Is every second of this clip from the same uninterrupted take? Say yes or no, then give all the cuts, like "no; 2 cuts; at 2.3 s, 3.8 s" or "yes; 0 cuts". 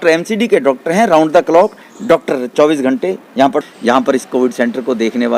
no; 1 cut; at 3.6 s